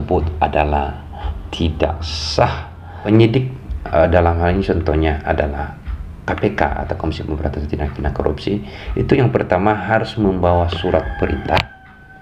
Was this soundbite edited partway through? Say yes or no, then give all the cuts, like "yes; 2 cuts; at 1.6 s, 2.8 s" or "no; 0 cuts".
yes; 1 cut; at 2.9 s